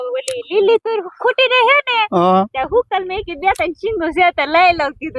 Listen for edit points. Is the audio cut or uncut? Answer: uncut